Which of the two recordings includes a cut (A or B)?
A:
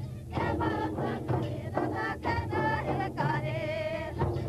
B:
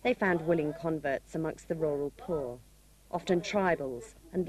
A